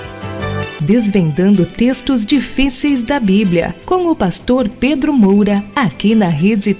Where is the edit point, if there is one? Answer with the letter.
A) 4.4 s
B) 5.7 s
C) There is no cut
B